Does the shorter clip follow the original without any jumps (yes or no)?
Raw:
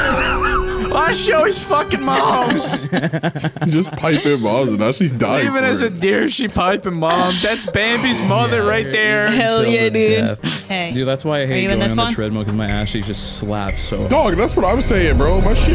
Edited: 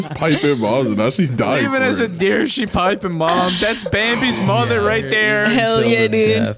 yes